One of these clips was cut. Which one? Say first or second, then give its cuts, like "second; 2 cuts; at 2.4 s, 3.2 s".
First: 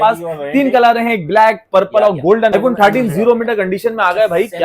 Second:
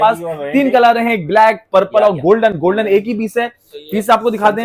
first; 1 cut; at 2.5 s